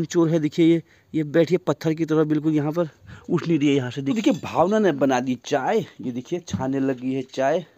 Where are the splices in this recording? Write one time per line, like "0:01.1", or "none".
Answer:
0:04.0